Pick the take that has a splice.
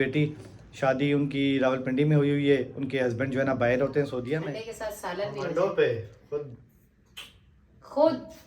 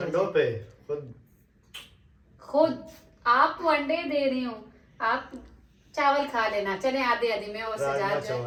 first; 1 cut; at 4.5 s

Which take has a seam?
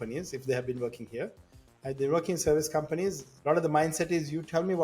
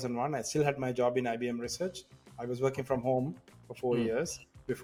first; 1 cut; at 3.3 s

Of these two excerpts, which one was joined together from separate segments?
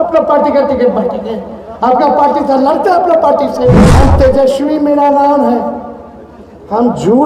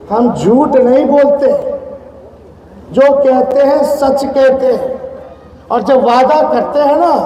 first; 1 cut; at 3.9 s

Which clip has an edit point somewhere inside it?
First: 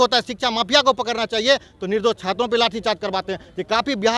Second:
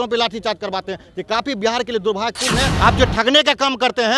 second; 1 cut; at 2.7 s

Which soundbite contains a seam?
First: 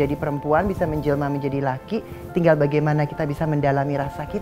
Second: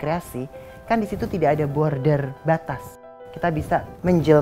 second; 1 cut; at 3.5 s

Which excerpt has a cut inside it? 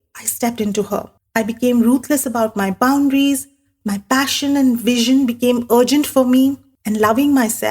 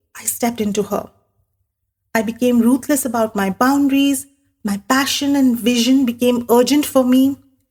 first; 2 cuts; at 1.2 s, 6.7 s

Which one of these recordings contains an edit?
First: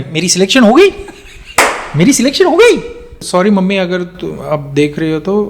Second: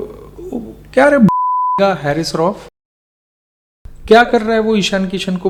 first; 1 cut; at 3.1 s

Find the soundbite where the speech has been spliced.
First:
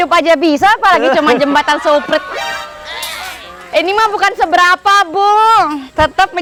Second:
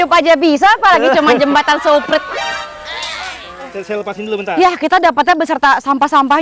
second; 1 cut; at 3.7 s

